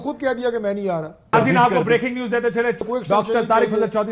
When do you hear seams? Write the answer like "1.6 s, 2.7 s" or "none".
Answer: 1.3 s, 2.9 s